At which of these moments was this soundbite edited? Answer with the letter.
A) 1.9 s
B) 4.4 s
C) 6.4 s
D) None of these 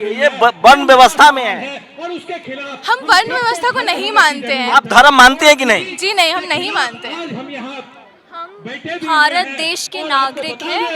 D